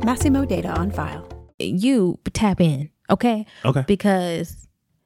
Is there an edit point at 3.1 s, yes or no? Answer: no